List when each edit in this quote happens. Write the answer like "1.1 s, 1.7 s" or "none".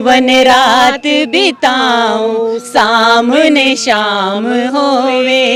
none